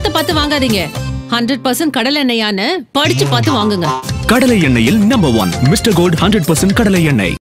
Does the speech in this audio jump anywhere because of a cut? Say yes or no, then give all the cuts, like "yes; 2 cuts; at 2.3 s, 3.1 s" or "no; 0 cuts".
no; 0 cuts